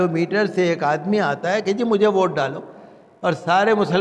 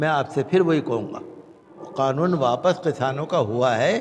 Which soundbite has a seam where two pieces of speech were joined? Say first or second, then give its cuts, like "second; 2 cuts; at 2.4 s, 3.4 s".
second; 1 cut; at 1.8 s